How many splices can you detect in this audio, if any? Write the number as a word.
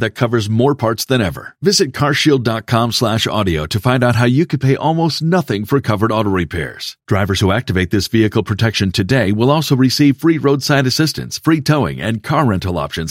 zero